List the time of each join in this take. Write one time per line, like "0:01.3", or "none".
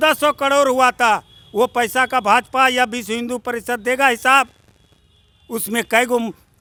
none